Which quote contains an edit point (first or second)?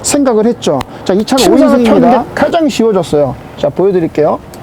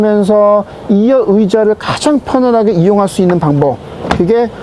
first